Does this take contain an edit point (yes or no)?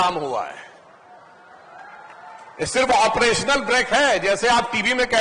no